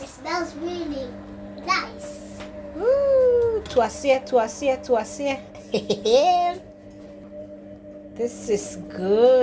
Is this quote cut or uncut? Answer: cut